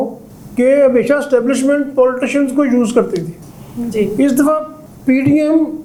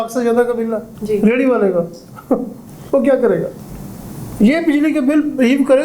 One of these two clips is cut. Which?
second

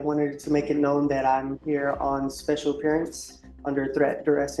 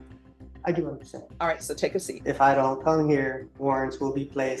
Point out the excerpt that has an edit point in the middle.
second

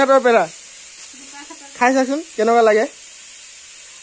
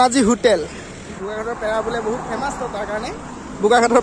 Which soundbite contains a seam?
second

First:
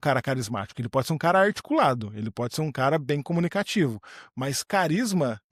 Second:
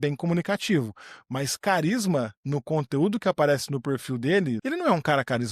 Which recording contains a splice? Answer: second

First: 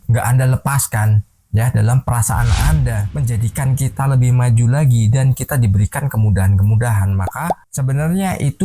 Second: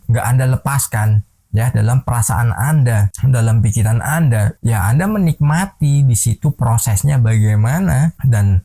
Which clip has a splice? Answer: first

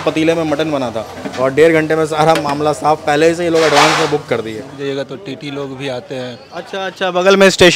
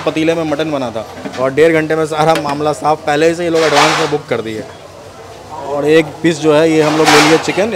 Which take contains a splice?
first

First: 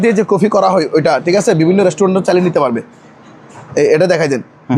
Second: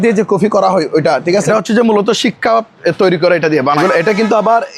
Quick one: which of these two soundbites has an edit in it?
second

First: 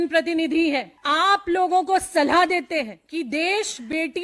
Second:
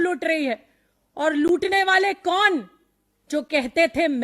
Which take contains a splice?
first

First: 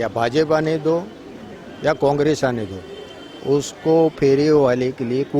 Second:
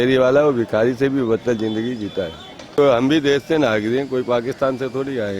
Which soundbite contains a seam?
second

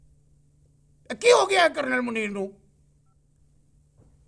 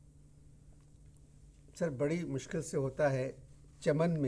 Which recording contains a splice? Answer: first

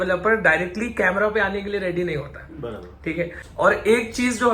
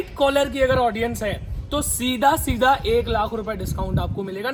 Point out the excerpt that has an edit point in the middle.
first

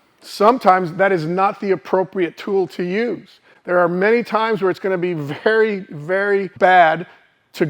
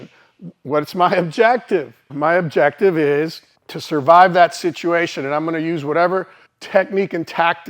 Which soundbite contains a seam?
first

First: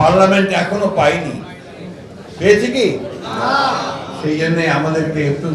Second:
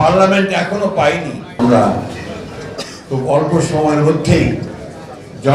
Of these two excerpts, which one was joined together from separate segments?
second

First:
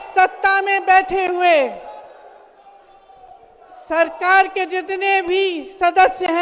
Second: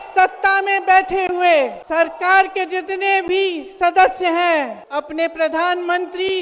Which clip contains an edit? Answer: second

